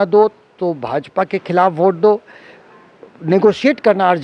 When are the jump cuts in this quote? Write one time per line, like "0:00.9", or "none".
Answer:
none